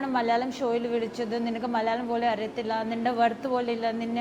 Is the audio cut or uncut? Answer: uncut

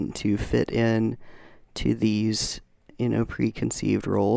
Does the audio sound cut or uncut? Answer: uncut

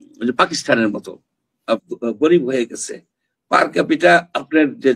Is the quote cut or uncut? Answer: cut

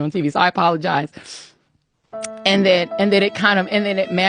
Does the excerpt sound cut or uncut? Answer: uncut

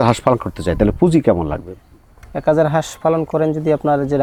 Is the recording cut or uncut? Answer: uncut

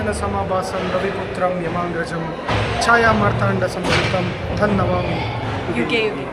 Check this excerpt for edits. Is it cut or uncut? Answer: uncut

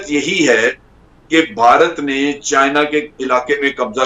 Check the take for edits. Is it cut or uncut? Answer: uncut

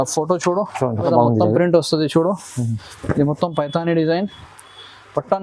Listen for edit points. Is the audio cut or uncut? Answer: cut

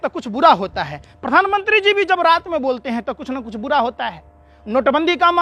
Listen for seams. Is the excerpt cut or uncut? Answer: uncut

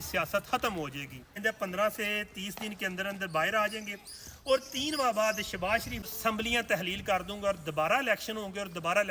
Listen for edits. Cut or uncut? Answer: cut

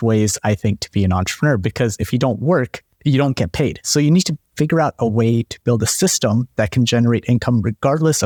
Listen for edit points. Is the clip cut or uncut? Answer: uncut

